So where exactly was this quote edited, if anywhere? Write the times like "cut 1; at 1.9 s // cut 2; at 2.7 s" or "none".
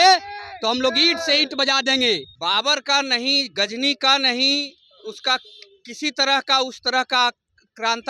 cut 1; at 2.3 s